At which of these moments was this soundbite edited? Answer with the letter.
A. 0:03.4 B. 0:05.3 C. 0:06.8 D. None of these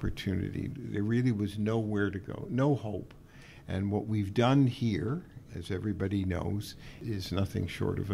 D